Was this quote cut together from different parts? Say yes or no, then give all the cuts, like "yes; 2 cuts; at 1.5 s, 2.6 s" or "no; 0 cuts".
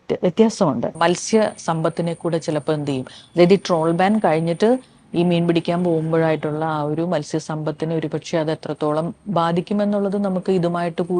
yes; 1 cut; at 0.9 s